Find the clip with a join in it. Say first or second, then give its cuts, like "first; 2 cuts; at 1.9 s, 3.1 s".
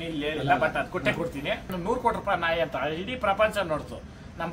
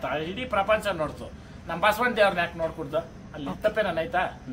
first; 1 cut; at 1.7 s